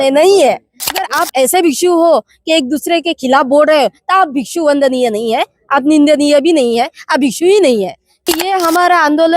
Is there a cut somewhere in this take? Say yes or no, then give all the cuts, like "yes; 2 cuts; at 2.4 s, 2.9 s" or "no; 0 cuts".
yes; 2 cuts; at 1.0 s, 8.1 s